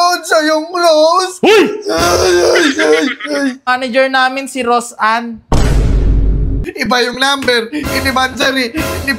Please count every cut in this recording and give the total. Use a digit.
2